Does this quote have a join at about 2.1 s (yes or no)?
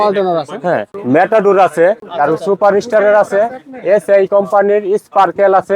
yes